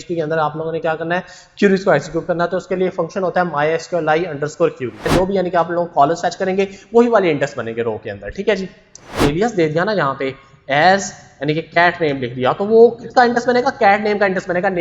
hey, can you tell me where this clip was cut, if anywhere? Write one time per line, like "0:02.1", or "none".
0:05.1
0:09.2